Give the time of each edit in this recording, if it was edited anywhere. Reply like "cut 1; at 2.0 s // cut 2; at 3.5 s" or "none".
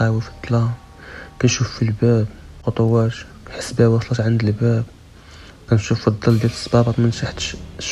none

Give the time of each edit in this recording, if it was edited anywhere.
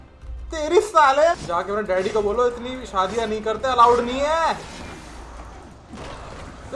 cut 1; at 1.5 s

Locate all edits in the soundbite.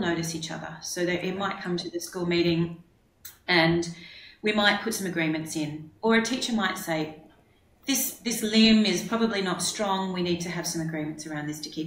none

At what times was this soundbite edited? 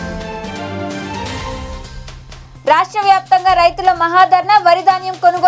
cut 1; at 2.0 s

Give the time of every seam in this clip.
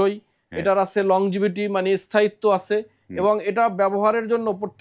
none

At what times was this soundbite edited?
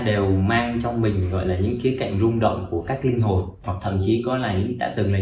cut 1; at 3.7 s

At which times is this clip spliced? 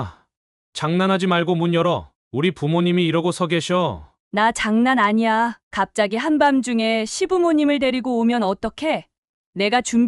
none

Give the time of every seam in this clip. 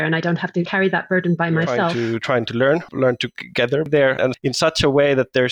cut 1; at 2.1 s

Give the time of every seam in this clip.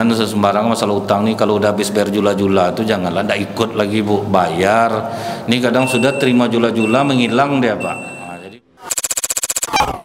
cut 1; at 8.2 s

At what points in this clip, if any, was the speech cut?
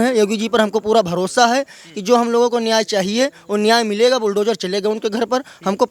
none

